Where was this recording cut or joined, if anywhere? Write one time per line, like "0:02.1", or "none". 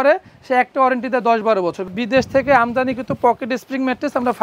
0:01.9

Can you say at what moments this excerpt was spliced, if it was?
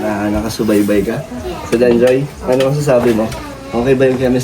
none

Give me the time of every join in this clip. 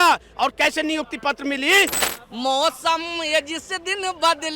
0:02.2

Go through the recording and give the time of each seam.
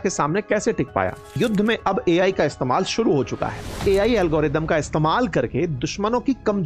0:01.4
0:03.8

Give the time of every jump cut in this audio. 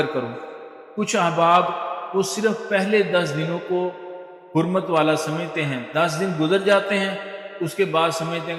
none

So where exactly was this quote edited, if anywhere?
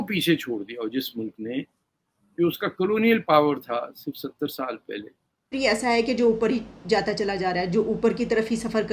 0:05.5

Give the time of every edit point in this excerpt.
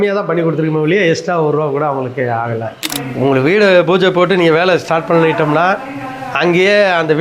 0:02.9

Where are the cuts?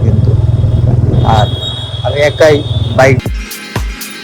0:03.2

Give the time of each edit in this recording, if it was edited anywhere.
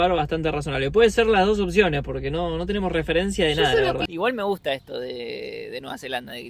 0:04.1

